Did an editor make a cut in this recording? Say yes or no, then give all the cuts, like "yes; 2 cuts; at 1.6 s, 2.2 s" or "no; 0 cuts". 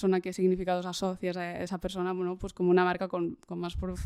no; 0 cuts